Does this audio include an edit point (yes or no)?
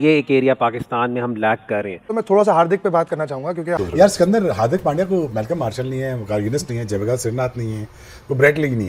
yes